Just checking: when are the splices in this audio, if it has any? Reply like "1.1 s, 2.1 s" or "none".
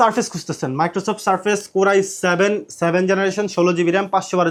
none